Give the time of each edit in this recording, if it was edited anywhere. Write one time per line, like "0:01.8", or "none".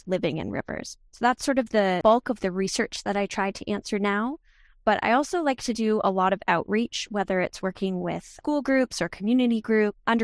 0:02.0